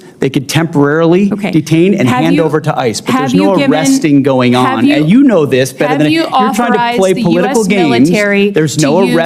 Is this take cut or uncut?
uncut